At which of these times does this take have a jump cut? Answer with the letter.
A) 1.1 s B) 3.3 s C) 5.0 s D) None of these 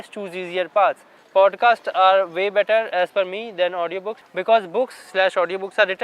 A